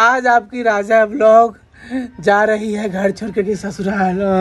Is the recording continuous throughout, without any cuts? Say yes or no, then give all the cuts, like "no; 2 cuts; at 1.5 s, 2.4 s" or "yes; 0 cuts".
yes; 0 cuts